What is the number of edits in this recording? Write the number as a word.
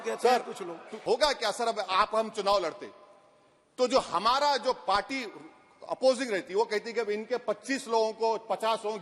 one